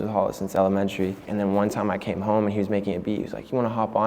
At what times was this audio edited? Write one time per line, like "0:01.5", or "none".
0:01.2

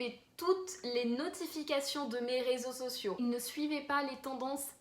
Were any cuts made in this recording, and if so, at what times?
0:03.2

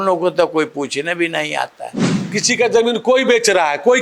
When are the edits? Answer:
0:02.2

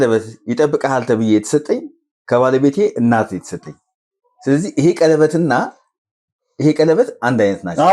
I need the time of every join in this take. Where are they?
none

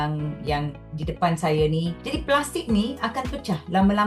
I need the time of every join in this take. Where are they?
0:02.0

